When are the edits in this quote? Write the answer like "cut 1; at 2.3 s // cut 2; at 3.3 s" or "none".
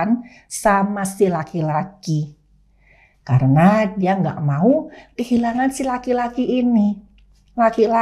none